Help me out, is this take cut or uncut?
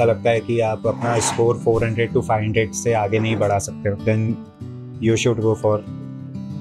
cut